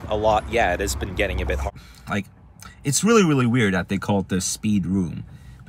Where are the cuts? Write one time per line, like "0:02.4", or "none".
0:01.7